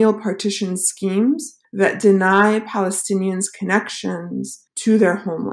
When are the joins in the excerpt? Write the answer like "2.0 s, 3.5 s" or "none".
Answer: 4.6 s